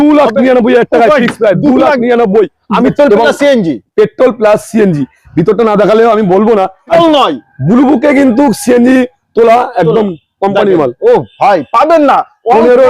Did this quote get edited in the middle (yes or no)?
yes